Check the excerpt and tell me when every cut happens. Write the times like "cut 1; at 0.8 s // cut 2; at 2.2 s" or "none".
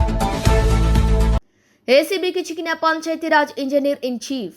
cut 1; at 1.4 s